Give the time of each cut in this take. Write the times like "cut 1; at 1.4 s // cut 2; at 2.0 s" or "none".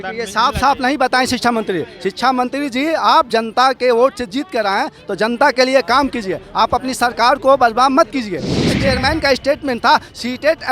cut 1; at 8.8 s